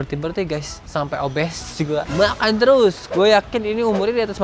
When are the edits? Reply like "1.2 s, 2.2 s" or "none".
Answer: 3.0 s